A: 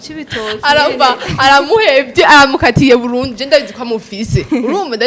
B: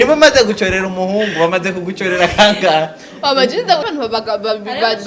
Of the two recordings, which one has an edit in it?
B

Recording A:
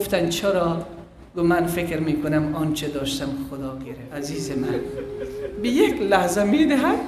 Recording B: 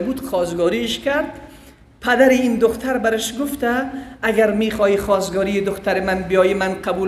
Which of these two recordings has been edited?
A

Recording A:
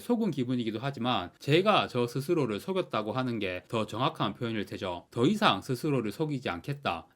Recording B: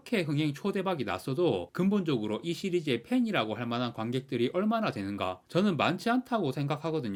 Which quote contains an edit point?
A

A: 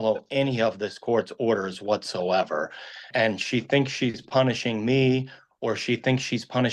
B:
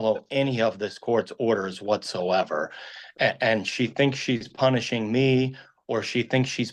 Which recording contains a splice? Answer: A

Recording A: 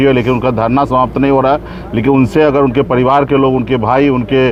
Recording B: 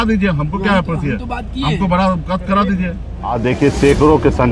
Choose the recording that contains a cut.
B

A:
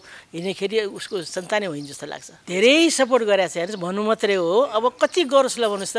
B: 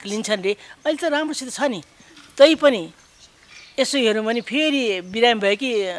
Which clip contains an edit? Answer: A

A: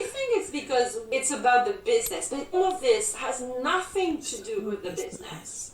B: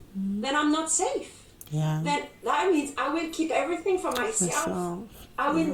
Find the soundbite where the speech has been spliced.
A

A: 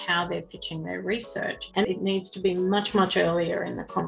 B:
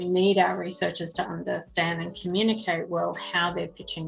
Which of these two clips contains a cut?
A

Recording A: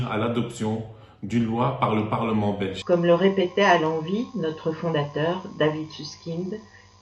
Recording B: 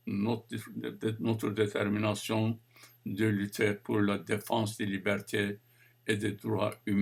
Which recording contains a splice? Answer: A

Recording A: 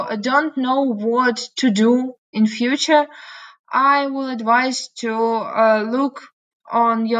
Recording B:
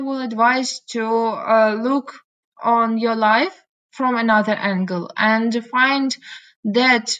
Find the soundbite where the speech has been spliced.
A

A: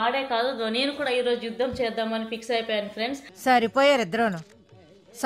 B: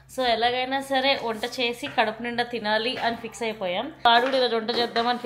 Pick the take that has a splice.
B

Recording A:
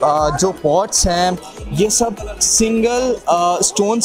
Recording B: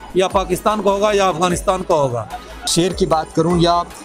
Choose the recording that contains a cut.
B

